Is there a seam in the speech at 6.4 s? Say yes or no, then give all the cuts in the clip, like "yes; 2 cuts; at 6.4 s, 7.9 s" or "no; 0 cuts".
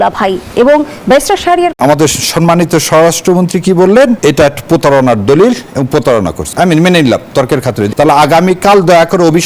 yes; 4 cuts; at 1.7 s, 4.2 s, 6.4 s, 7.9 s